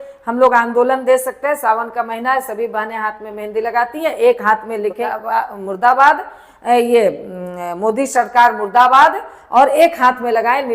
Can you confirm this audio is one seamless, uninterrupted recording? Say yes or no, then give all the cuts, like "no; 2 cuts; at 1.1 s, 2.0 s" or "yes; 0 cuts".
no; 1 cut; at 5.1 s